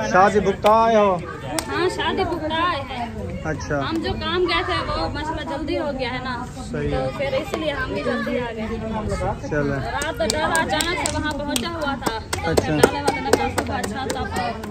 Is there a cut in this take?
no; 0 cuts

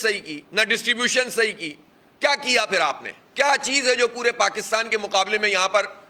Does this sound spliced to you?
no; 0 cuts

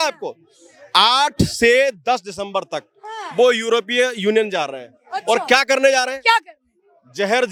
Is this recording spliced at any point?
no; 0 cuts

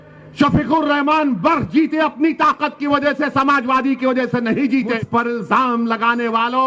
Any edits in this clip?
yes; 1 cut; at 4.9 s

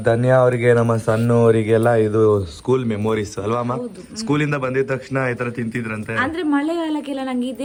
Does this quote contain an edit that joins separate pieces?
no; 0 cuts

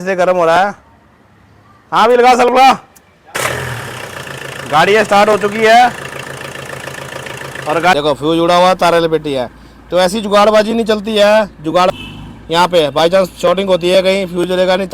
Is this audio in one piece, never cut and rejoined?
no; 3 cuts; at 3.3 s, 7.9 s, 11.9 s

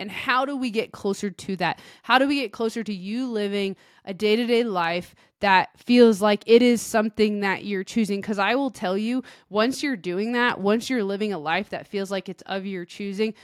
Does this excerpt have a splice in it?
no; 0 cuts

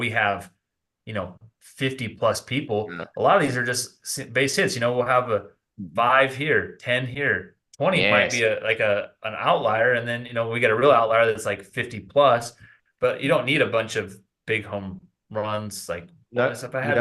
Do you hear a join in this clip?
no; 0 cuts

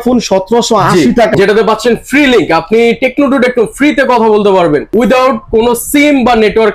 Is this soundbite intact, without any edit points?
no; 1 cut; at 1.3 s

